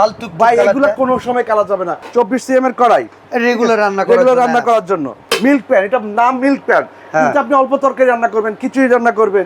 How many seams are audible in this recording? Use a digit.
2